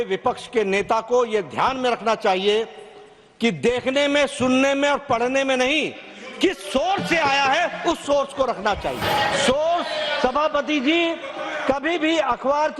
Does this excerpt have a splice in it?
yes; 1 cut; at 9.0 s

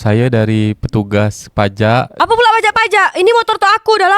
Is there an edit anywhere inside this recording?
yes; 1 cut; at 2.1 s

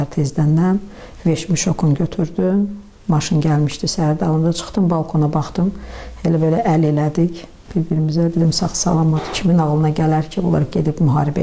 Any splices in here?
no; 0 cuts

